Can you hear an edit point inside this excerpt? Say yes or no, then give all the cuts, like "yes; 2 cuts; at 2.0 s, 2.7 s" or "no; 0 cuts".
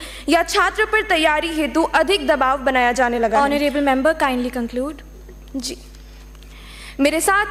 no; 0 cuts